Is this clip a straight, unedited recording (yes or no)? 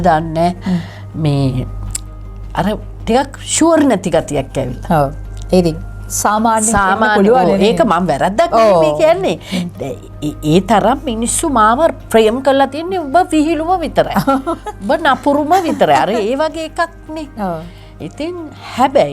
yes